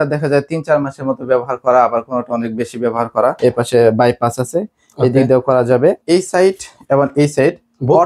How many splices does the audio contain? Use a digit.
2